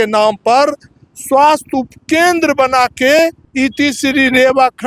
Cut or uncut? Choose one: cut